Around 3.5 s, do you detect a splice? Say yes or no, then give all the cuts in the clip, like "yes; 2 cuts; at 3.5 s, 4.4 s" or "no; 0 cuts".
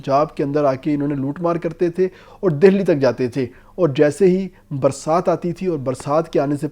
no; 0 cuts